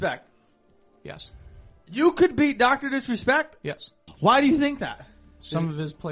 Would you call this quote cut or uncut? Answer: cut